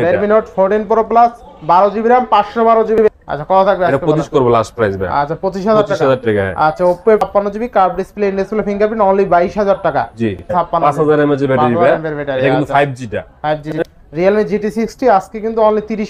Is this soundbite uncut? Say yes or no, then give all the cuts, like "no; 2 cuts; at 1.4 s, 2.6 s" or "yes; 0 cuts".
no; 4 cuts; at 3.0 s, 7.2 s, 10.5 s, 13.7 s